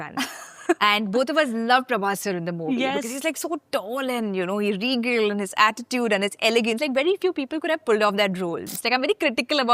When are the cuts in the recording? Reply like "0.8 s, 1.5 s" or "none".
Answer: 8.6 s